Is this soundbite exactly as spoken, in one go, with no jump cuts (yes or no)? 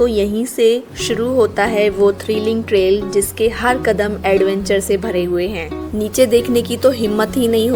yes